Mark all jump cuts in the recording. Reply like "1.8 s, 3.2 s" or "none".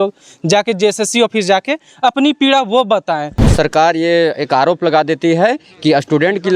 3.5 s